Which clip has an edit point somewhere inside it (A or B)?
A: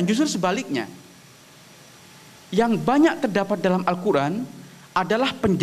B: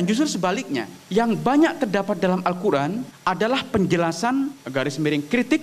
B